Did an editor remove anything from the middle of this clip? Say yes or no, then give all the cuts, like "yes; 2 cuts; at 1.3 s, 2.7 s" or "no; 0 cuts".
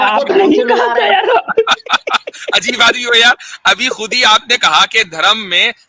no; 0 cuts